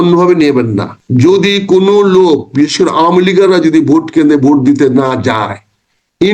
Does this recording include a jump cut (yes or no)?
yes